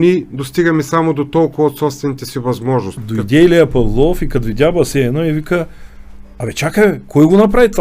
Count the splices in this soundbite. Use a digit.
1